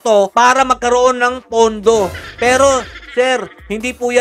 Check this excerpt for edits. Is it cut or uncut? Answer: uncut